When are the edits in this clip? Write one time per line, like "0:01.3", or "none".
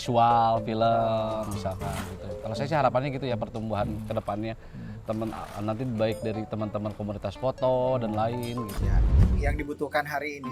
0:09.2